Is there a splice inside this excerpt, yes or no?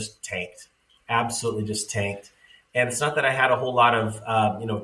no